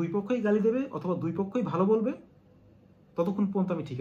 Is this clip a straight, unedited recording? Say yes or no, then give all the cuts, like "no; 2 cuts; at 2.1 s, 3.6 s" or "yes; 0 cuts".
yes; 0 cuts